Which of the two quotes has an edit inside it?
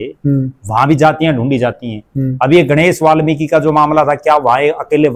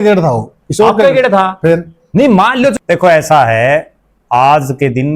second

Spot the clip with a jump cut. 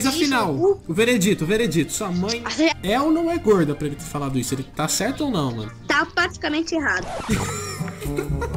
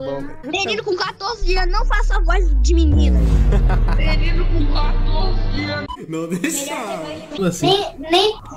second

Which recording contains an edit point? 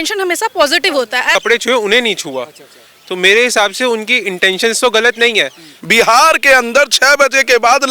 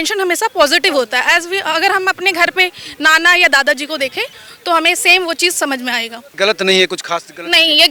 first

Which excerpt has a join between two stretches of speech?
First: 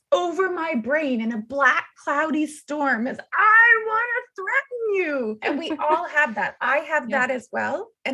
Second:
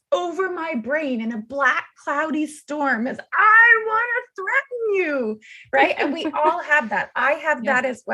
first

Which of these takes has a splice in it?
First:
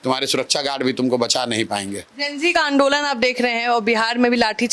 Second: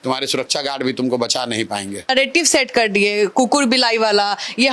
second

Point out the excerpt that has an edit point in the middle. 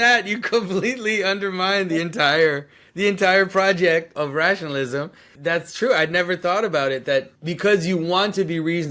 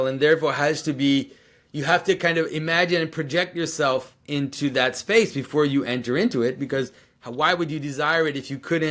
first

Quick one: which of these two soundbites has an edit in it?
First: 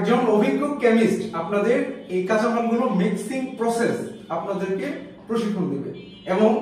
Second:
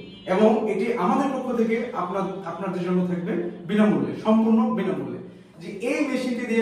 second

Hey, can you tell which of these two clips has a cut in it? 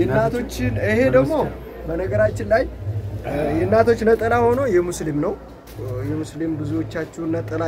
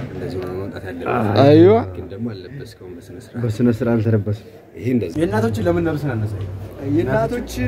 second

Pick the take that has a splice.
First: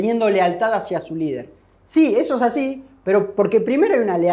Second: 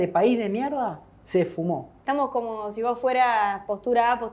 second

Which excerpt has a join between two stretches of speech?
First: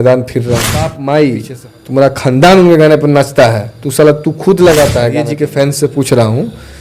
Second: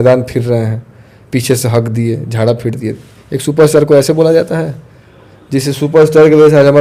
first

